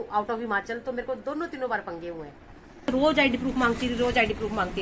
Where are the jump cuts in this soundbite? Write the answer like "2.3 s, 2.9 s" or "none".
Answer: 2.9 s